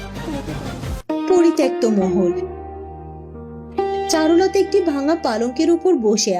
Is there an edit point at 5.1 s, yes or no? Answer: no